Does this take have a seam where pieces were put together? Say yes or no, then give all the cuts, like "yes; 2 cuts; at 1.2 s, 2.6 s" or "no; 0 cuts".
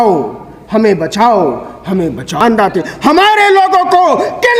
yes; 1 cut; at 2.3 s